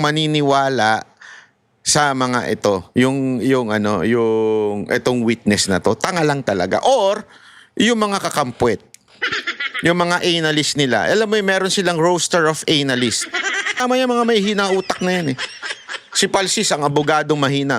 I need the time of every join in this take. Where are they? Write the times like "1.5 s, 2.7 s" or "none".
13.8 s